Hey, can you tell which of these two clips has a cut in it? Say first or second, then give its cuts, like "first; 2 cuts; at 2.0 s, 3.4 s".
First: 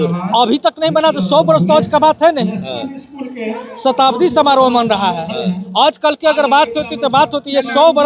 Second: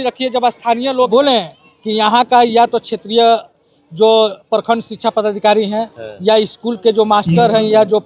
second; 1 cut; at 1.1 s